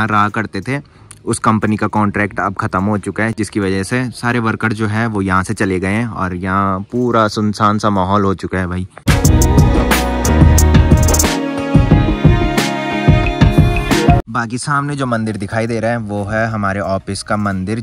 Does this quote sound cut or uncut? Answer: uncut